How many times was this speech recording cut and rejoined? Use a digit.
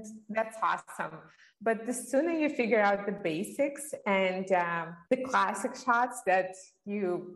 1